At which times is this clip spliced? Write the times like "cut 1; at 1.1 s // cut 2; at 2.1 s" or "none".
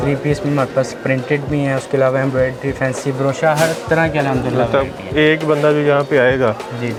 none